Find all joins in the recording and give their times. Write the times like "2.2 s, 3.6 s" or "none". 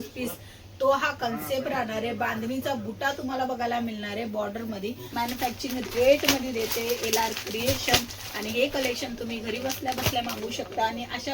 5.0 s